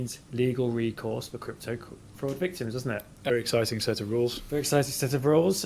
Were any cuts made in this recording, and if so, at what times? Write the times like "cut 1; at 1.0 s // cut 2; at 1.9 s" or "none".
cut 1; at 3.3 s